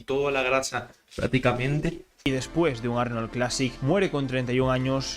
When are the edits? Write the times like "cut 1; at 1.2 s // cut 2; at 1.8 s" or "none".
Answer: cut 1; at 2.3 s

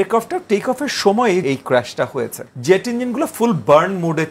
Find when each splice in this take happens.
cut 1; at 1.4 s // cut 2; at 2.5 s

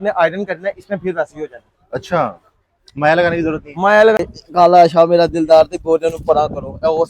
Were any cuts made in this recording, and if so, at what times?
cut 1; at 4.2 s

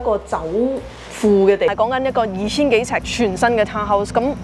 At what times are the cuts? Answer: cut 1; at 1.7 s

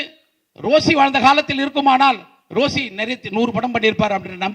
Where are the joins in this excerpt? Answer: none

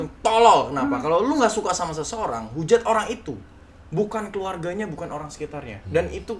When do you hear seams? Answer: none

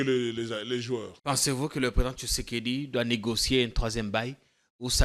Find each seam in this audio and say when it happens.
cut 1; at 1.1 s

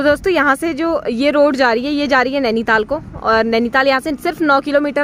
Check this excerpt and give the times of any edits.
none

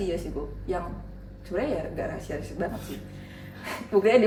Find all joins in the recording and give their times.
none

